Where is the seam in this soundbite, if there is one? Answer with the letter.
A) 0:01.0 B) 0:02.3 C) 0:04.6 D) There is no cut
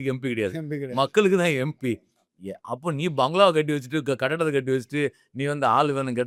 D